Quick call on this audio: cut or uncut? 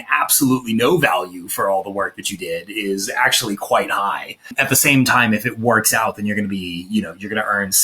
cut